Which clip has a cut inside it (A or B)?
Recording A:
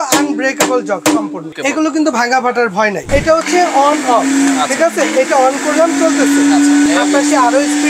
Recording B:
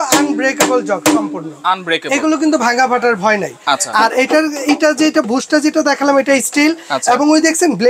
A